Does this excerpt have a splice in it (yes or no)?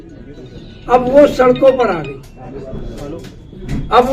no